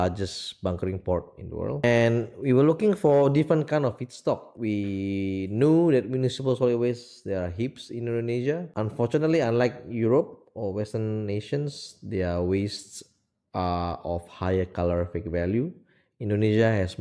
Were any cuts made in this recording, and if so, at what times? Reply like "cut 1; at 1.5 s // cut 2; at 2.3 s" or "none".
cut 1; at 1.8 s // cut 2; at 4.5 s // cut 3; at 8.7 s

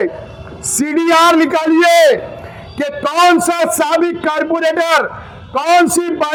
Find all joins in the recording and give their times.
none

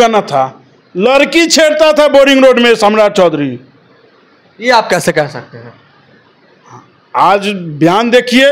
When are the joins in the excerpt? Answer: none

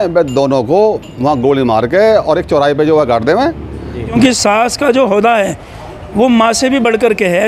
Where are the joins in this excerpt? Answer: cut 1; at 4.2 s

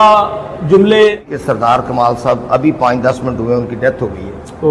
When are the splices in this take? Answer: cut 1; at 1.2 s

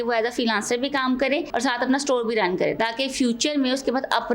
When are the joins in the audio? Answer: cut 1; at 1.5 s

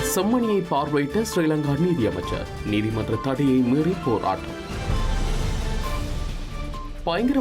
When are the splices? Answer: none

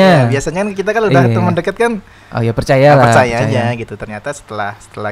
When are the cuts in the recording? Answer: none

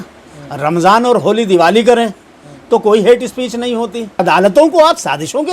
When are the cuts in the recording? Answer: cut 1; at 4.2 s

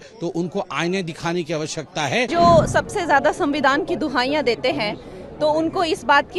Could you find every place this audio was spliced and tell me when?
cut 1; at 2.3 s

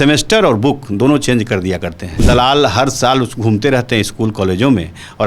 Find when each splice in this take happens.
cut 1; at 2.2 s

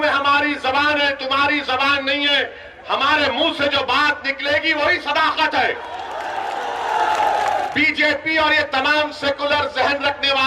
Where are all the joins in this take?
cut 1; at 7.7 s

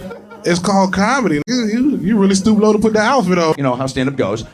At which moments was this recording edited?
cut 1; at 1.5 s // cut 2; at 3.5 s

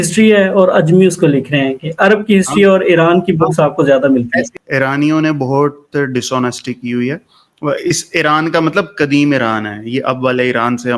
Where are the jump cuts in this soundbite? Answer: cut 1; at 4.6 s

